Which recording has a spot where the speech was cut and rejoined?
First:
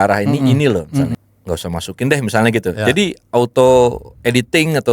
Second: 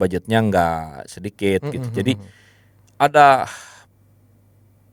first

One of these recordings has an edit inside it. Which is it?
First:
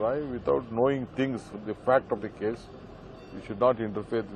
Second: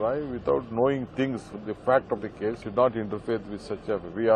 second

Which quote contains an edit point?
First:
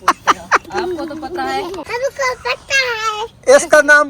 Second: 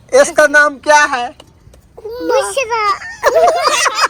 first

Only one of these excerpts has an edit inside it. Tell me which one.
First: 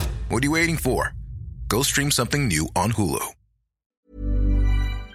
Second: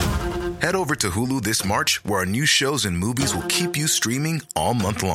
first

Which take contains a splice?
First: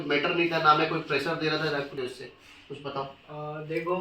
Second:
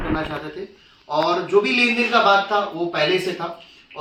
first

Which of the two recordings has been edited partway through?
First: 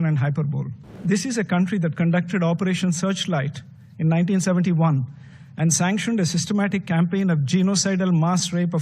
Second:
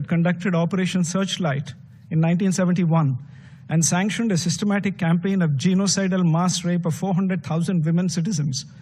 first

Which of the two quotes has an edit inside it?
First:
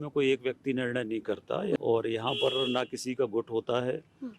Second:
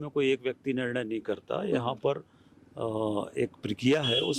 first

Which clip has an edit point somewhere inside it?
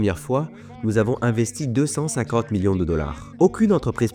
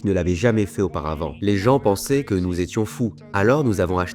second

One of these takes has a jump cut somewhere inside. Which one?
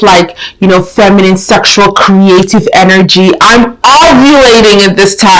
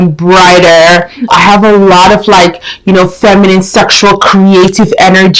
second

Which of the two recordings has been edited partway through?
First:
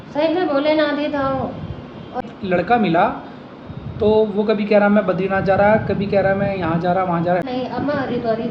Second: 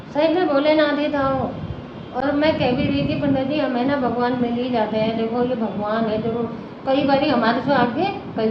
first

